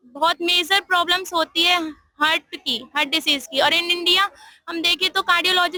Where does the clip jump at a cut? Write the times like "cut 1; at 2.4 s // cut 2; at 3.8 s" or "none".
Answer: none